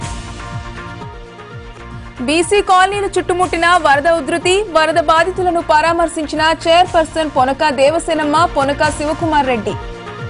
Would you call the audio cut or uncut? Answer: uncut